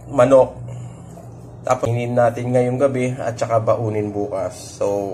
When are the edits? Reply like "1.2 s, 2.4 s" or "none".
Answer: 1.9 s

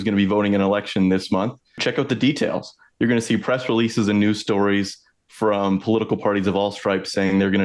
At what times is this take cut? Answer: 1.8 s

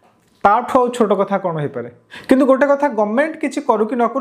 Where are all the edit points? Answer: 2.1 s

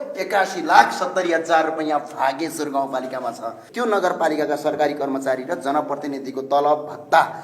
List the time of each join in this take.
3.6 s

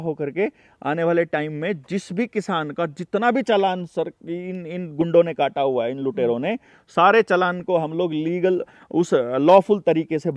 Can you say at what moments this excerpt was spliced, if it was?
none

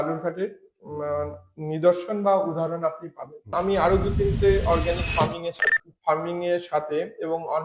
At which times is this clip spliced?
3.5 s

